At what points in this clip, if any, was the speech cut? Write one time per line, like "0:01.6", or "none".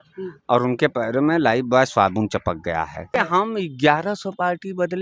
0:03.2